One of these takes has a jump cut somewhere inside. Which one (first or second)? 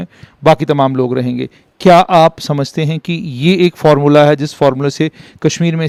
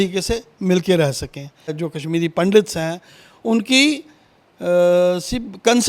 second